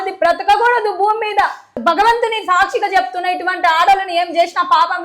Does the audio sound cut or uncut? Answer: cut